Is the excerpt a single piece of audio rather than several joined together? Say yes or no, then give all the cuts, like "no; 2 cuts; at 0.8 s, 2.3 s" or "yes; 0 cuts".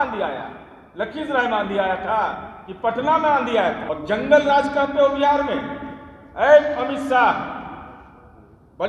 no; 1 cut; at 3.9 s